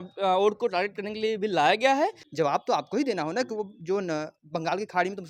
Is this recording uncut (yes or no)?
no